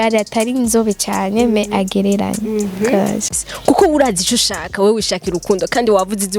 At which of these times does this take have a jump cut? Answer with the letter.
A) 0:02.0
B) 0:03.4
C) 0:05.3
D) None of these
B